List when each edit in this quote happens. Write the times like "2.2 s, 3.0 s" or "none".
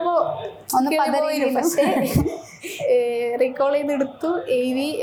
none